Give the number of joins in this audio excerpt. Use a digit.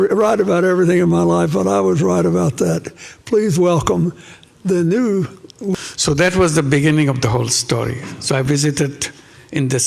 1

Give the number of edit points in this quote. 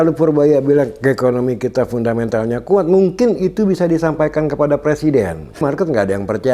1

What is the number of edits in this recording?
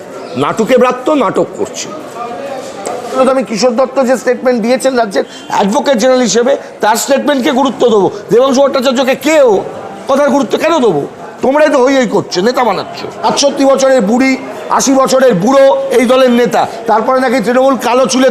2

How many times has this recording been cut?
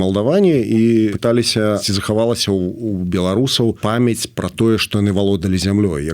2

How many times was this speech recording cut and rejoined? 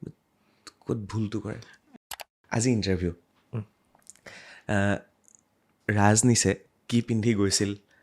1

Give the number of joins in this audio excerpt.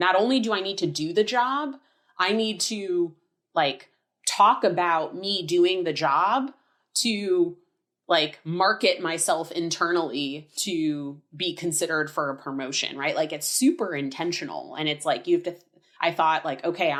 0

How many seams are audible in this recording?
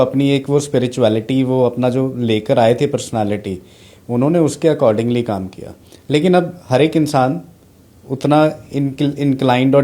0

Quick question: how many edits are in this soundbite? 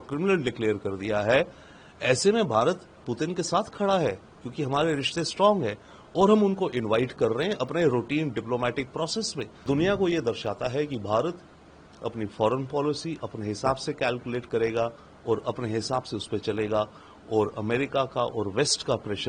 1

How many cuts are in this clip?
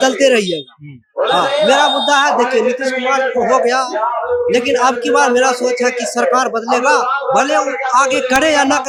0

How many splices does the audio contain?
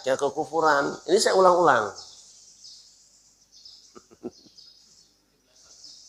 0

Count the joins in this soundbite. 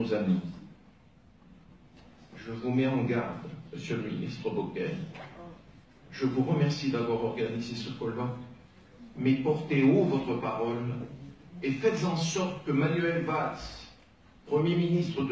0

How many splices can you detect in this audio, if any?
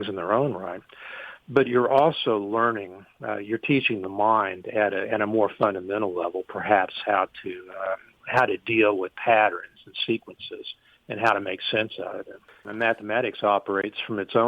1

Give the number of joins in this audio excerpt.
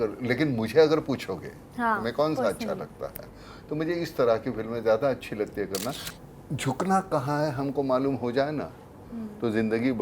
1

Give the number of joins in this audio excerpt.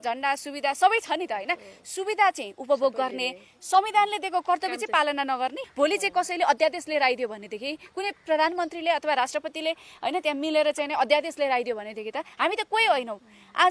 1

